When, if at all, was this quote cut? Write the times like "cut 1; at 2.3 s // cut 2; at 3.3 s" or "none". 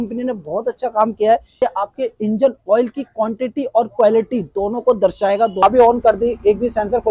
cut 1; at 1.6 s // cut 2; at 5.6 s

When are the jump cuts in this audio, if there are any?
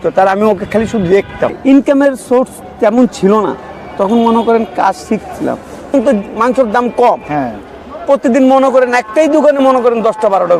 cut 1; at 1.6 s // cut 2; at 5.9 s

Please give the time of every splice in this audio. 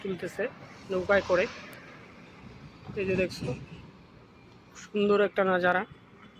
none

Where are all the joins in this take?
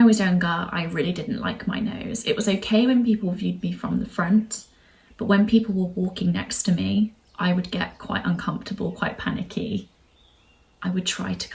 none

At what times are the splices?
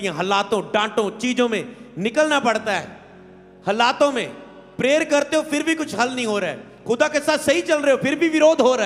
none

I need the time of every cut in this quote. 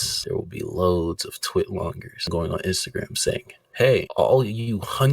cut 1; at 2.3 s

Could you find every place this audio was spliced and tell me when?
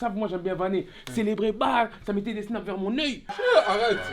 cut 1; at 3.2 s

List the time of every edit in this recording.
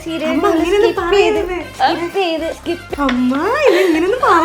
cut 1; at 2.8 s

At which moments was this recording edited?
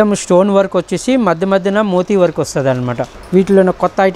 cut 1; at 3.1 s

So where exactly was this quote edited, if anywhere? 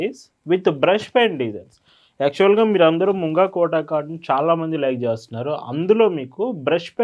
none

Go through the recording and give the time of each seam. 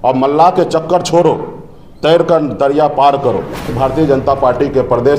cut 1; at 3.7 s

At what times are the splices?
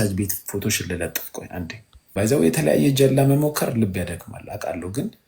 cut 1; at 2.1 s

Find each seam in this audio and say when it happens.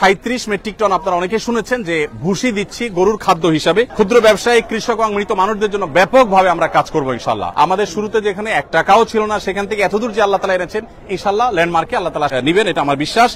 cut 1; at 3.9 s // cut 2; at 7.5 s // cut 3; at 12.3 s

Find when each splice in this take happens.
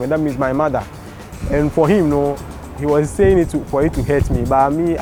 none

